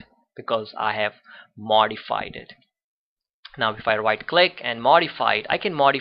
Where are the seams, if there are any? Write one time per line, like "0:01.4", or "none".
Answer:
0:04.0